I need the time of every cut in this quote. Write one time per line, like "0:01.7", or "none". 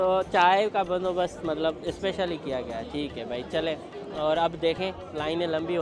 none